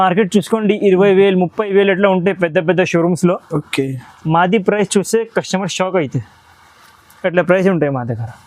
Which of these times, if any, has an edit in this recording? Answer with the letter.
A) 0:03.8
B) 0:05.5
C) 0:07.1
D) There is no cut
D